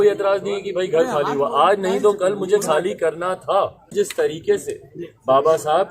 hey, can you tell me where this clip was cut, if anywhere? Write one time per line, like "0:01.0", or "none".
0:03.9